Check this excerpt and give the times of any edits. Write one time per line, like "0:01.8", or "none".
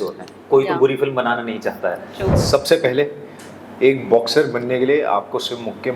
0:02.4

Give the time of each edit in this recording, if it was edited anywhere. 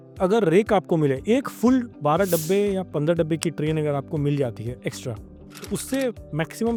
none

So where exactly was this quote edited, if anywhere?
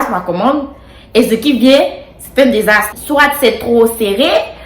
0:02.9

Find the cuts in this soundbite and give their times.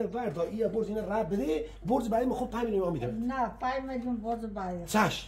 none

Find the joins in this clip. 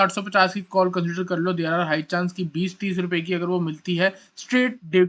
none

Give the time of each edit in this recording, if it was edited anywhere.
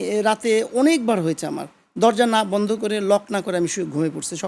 none

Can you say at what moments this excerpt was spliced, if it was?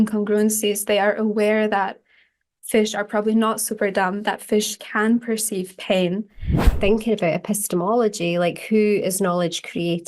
0:06.7

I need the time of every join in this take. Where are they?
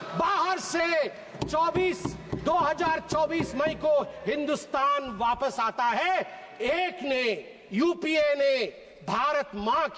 none

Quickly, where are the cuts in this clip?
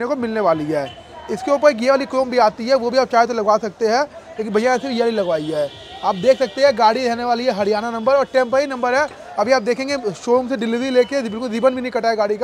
none

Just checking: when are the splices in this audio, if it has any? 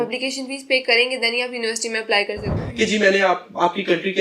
0:02.5

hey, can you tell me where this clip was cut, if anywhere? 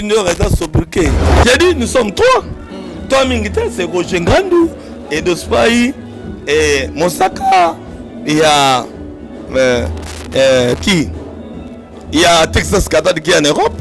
0:01.2

